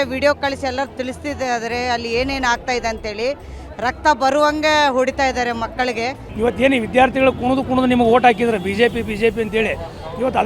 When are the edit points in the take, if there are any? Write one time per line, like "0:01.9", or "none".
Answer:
0:06.3